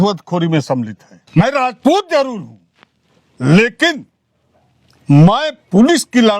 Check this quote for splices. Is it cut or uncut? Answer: cut